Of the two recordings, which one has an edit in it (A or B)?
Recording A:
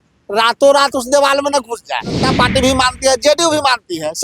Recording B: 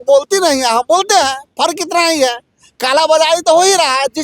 A